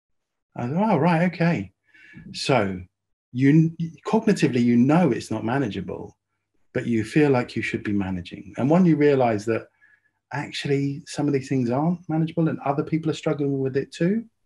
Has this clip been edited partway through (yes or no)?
no